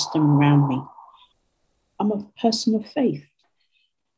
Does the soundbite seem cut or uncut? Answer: cut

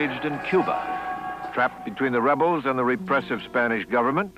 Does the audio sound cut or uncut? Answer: uncut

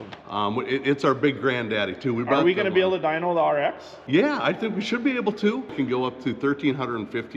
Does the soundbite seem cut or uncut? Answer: cut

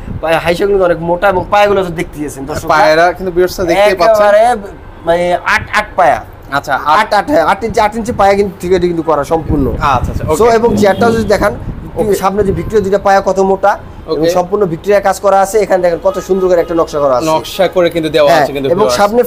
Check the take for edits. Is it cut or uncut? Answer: uncut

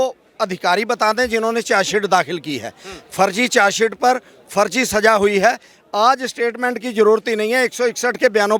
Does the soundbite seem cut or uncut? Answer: uncut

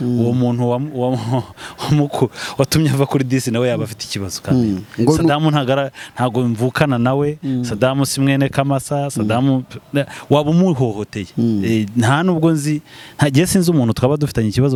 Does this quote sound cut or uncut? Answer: uncut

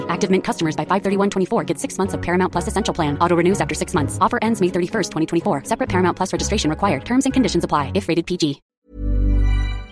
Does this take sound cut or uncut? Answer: cut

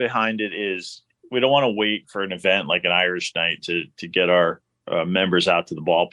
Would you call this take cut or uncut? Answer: cut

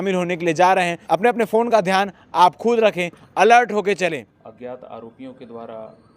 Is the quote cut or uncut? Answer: cut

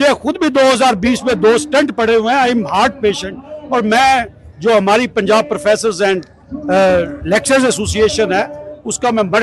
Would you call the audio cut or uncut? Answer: uncut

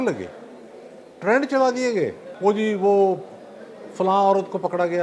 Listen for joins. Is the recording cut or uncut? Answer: cut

